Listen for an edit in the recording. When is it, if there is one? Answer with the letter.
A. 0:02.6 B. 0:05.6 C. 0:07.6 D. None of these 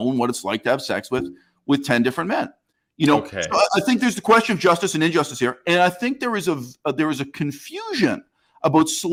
D